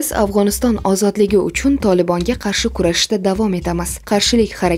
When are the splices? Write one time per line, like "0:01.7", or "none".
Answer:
none

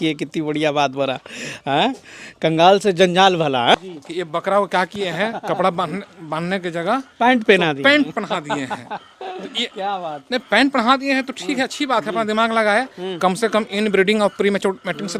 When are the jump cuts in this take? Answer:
0:03.8

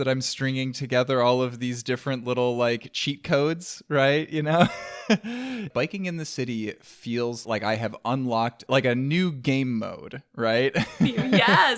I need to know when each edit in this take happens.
0:05.7
0:07.4
0:08.6

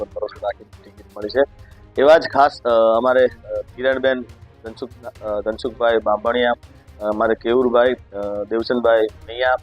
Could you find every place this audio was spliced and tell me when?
none

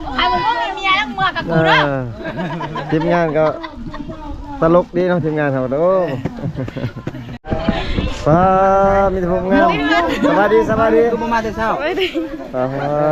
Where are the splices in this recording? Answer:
0:07.4

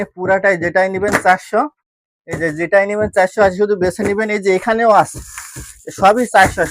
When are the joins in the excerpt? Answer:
none

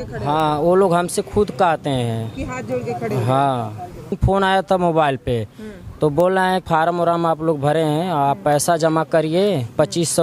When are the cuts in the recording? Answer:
0:04.2
0:06.6

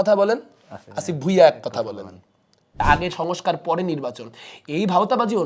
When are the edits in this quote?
0:02.8

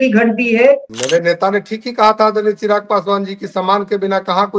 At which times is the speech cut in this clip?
0:00.9

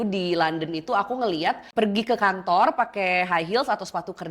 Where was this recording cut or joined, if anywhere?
0:01.6

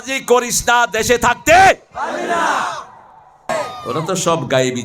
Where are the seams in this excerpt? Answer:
0:03.5

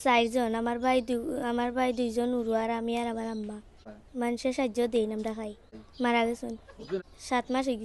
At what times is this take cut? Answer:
0:03.9
0:05.8
0:07.0

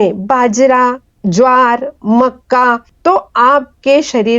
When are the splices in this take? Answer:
0:01.1
0:02.9

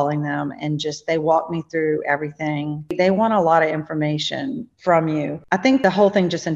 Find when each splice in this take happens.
0:02.9
0:04.7
0:05.7

